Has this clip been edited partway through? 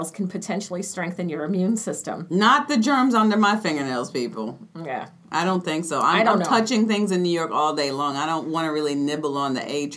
no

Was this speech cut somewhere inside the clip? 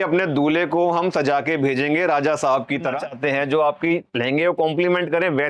yes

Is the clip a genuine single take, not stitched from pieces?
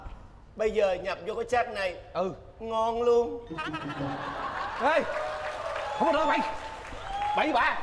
yes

